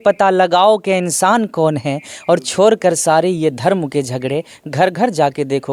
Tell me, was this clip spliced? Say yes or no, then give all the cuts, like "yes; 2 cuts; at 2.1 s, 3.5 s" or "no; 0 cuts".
no; 0 cuts